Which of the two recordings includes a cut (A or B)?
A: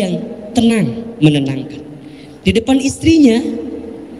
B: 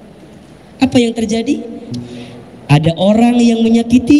B